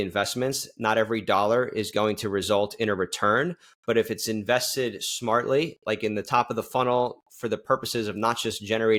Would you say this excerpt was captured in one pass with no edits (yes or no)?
yes